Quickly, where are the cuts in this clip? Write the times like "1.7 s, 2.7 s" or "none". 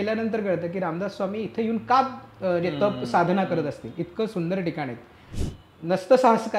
5.3 s